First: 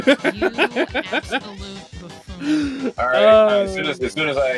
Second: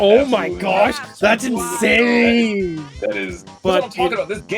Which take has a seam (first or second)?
second